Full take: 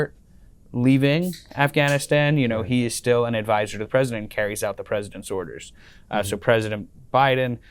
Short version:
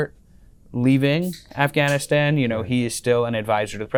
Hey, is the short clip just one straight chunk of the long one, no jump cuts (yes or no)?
yes